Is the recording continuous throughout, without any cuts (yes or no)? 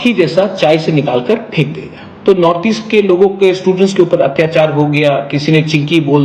no